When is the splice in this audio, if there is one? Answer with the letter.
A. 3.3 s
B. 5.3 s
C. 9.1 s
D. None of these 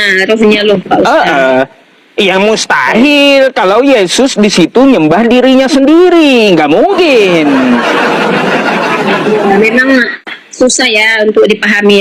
D